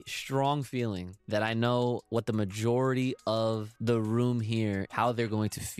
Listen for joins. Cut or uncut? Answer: cut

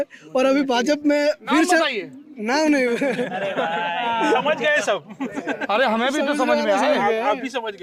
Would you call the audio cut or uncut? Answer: uncut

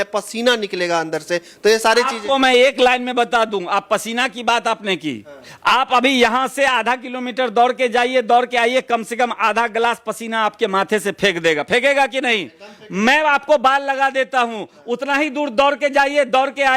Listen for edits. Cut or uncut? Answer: uncut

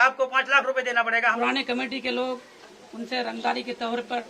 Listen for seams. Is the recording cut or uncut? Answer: cut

